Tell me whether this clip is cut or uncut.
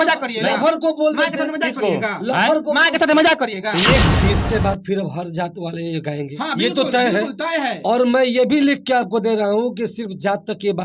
cut